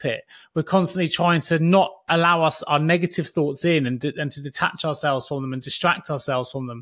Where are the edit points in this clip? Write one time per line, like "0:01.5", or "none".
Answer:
none